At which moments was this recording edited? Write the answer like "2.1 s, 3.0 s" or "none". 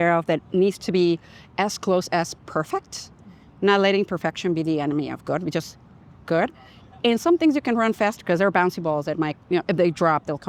none